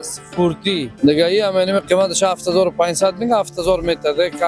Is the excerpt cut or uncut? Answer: cut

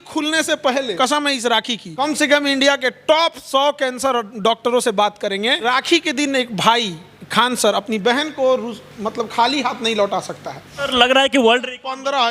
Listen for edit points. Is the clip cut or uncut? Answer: cut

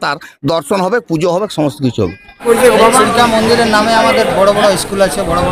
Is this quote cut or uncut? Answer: cut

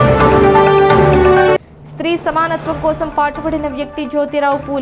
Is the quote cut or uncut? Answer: uncut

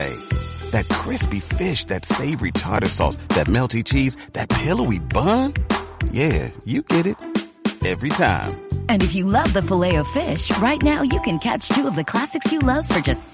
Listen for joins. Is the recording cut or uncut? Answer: uncut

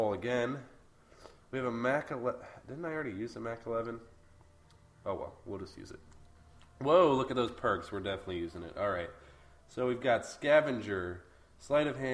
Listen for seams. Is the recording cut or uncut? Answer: uncut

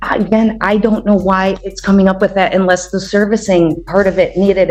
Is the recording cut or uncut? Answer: uncut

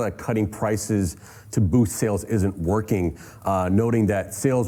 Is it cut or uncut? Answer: uncut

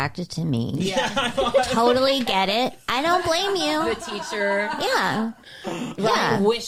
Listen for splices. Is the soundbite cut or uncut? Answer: uncut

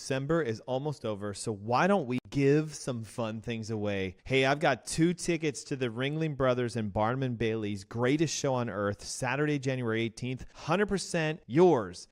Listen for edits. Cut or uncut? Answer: cut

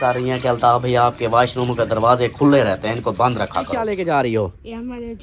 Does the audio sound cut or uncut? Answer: cut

